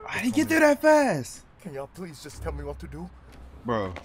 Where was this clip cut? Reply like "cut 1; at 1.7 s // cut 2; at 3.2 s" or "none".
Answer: none